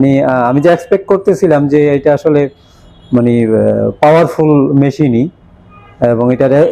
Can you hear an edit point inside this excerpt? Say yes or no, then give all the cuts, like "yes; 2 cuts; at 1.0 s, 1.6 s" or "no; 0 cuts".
no; 0 cuts